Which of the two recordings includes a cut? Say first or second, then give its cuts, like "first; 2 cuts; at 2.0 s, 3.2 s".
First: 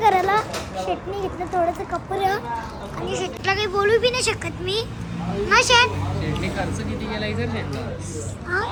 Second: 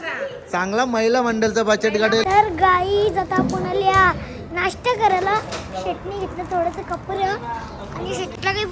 second; 1 cut; at 2.2 s